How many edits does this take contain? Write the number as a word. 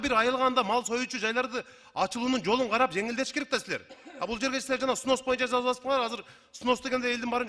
zero